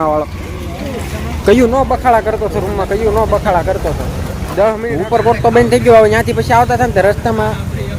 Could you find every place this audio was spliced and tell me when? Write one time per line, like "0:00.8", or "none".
0:04.9

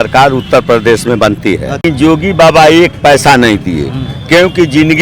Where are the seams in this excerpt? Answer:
0:01.8

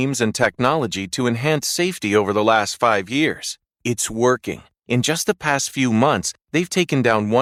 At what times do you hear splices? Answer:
none

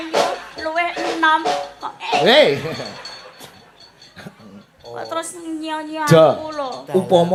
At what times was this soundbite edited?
none

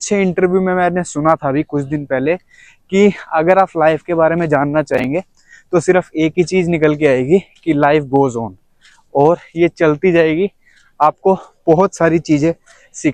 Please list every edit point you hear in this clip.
none

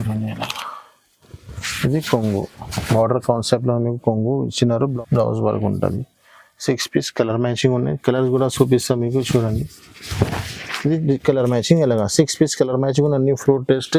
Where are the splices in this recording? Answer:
0:04.9

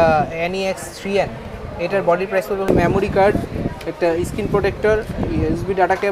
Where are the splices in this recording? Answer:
0:02.7

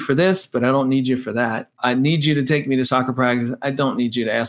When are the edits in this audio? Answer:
0:01.8
0:02.9

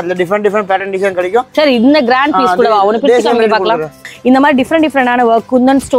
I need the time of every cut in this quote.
0:01.5
0:04.1

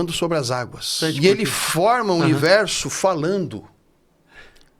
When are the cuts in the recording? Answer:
0:01.0

